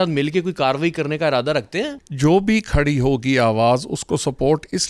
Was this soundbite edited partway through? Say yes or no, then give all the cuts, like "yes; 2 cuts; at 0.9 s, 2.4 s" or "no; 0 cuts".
yes; 1 cut; at 2.0 s